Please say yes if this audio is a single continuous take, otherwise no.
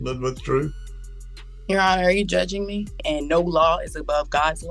no